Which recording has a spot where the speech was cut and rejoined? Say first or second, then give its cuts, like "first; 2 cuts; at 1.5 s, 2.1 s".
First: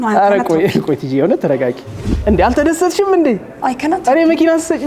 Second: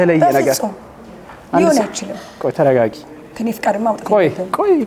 first; 1 cut; at 2.1 s